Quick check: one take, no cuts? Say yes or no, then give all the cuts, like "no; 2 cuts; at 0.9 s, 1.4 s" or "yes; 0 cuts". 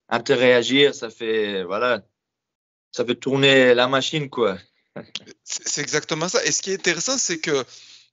yes; 0 cuts